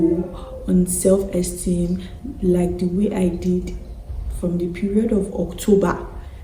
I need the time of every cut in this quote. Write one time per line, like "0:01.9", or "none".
none

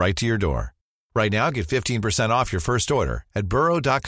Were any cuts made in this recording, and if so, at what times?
none

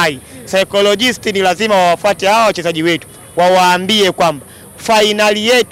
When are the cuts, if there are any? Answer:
none

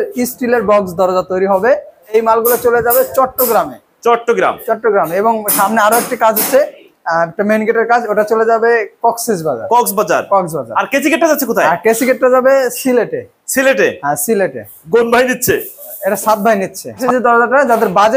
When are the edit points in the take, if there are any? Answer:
0:02.1
0:17.0

